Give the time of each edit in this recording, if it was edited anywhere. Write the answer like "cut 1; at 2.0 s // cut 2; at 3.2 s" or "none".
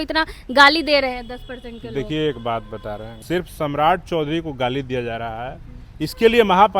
cut 1; at 3.2 s